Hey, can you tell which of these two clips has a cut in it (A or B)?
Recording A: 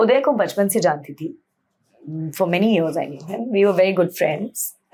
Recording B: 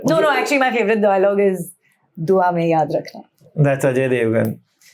B